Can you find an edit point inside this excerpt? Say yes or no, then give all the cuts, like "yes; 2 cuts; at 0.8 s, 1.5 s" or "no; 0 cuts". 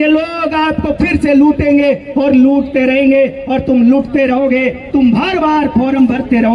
no; 0 cuts